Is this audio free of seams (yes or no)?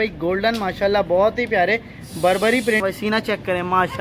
no